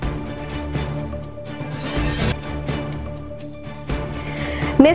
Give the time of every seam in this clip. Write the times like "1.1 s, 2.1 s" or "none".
none